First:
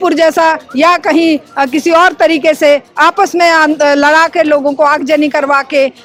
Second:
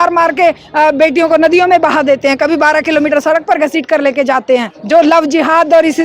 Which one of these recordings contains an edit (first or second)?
second